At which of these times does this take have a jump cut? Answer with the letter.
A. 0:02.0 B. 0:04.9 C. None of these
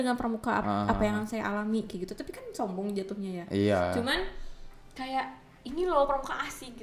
C